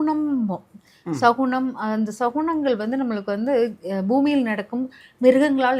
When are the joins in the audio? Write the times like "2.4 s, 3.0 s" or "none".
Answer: none